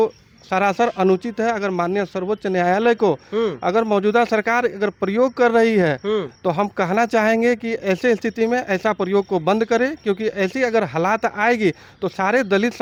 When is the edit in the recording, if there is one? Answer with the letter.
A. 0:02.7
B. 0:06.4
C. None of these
C